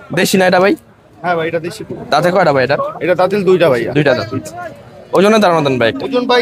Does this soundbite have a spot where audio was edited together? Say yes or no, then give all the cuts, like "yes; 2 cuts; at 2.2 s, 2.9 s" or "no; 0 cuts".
no; 0 cuts